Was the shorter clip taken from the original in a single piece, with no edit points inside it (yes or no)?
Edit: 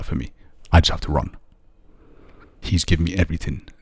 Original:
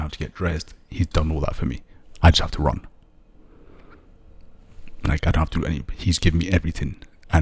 no